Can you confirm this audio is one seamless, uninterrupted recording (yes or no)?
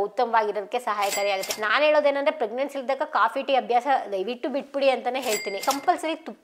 no